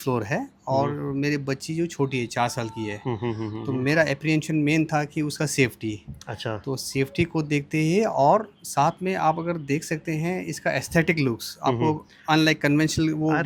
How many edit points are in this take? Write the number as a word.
zero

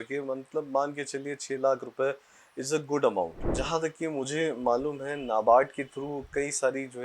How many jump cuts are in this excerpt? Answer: one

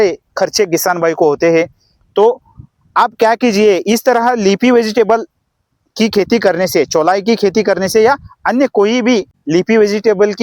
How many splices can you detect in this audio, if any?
one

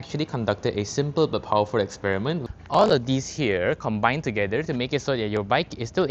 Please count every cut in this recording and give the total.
one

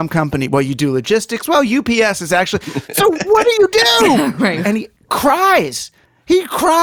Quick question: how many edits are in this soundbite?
one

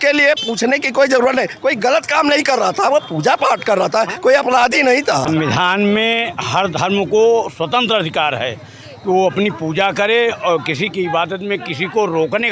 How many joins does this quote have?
one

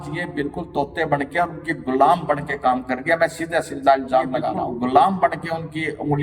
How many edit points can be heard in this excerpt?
one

